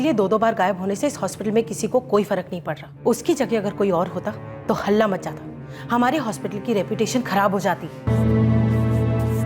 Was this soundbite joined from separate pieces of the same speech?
yes; 1 cut; at 8.1 s

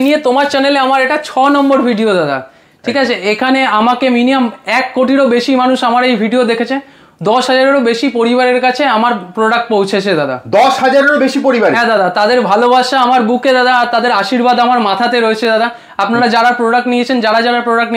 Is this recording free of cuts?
yes; 0 cuts

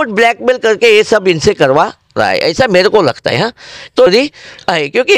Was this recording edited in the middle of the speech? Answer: no; 0 cuts

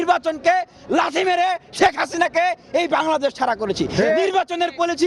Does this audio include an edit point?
no; 0 cuts

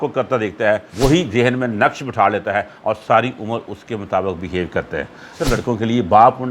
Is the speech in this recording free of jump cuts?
no; 2 cuts; at 0.9 s, 5.3 s

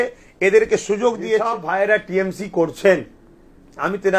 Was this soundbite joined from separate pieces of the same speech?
yes; 1 cut; at 1.6 s

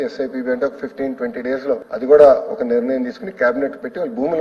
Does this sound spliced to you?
yes; 1 cut; at 1.9 s

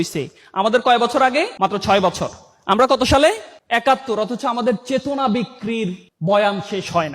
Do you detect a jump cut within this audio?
yes; 2 cuts; at 1.5 s, 3.5 s

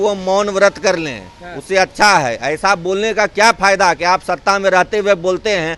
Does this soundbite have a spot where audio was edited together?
no; 0 cuts

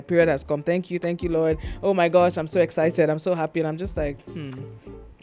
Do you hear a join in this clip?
no; 0 cuts

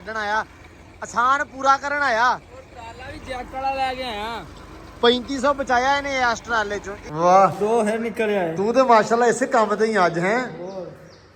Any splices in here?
yes; 1 cut; at 6.9 s

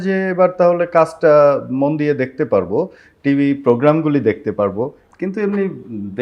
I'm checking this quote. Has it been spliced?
yes; 1 cut; at 5.0 s

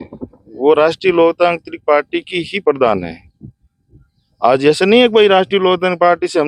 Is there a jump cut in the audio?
no; 0 cuts

